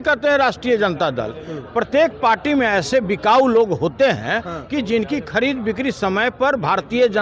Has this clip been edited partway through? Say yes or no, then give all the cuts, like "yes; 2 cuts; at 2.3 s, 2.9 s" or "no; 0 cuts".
no; 0 cuts